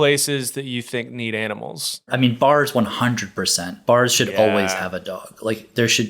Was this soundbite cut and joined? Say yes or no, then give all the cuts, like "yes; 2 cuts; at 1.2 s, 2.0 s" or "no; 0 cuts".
yes; 1 cut; at 2.1 s